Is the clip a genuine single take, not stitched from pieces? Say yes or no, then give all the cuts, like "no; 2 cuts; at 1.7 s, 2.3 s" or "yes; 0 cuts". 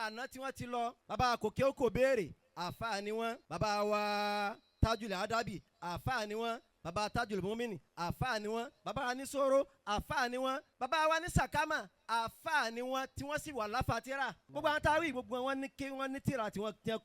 no; 4 cuts; at 1.0 s, 3.5 s, 10.7 s, 14.4 s